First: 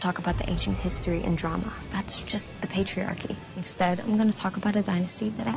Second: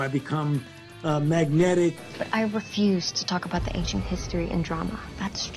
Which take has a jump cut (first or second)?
second